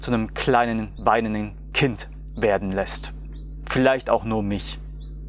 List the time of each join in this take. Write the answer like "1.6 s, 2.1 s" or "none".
none